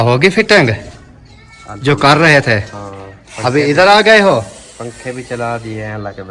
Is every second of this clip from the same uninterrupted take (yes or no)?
yes